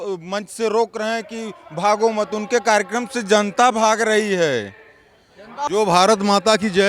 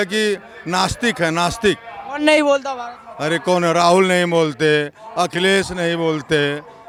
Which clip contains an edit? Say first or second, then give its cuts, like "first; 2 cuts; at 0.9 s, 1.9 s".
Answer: first; 1 cut; at 5.5 s